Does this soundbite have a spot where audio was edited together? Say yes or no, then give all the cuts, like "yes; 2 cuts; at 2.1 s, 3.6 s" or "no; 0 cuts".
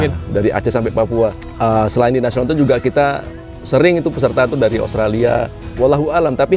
yes; 2 cuts; at 1.5 s, 5.6 s